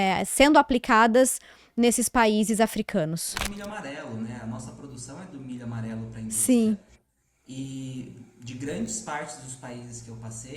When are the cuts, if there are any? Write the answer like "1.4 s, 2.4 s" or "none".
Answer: 3.4 s